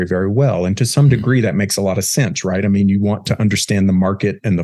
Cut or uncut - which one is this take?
uncut